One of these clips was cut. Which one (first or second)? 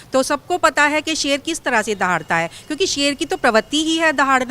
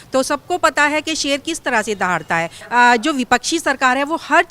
second